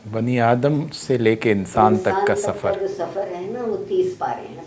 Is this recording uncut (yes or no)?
yes